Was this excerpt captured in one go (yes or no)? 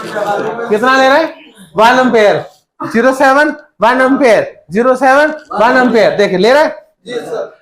yes